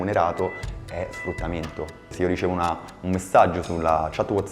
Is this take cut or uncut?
cut